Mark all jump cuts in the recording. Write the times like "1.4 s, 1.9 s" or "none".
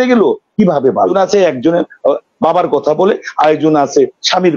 1.1 s

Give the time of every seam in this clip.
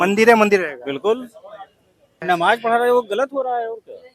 2.2 s

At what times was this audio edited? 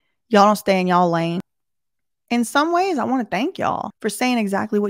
1.4 s, 3.9 s

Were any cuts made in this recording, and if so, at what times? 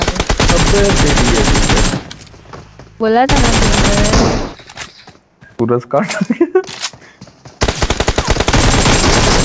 none

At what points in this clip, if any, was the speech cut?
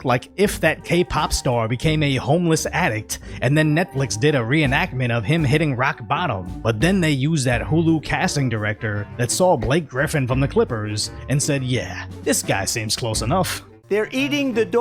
13.7 s

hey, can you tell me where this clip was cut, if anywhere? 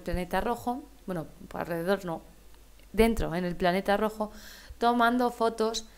3.0 s

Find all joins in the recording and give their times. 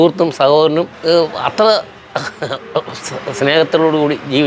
0.9 s

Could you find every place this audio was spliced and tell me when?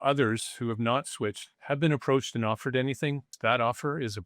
3.3 s

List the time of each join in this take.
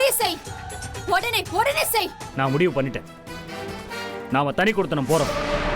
2.2 s

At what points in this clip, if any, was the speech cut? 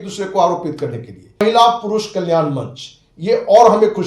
1.4 s

